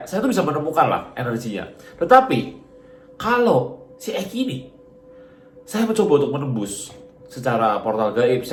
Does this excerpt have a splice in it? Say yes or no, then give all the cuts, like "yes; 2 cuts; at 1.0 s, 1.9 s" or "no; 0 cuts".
no; 0 cuts